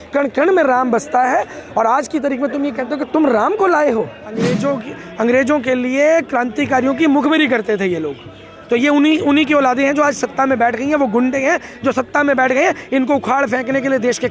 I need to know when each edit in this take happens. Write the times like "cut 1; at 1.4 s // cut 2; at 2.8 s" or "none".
cut 1; at 4.5 s